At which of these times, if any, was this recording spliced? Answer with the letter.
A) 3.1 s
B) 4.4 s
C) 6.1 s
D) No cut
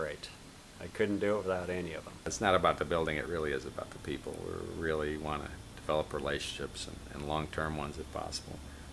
B